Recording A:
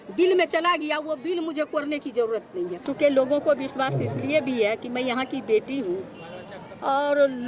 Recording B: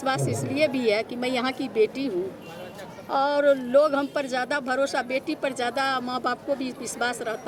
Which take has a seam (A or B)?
A